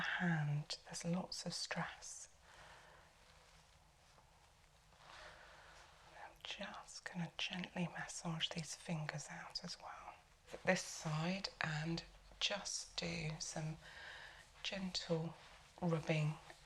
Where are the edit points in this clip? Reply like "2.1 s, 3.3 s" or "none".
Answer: 10.5 s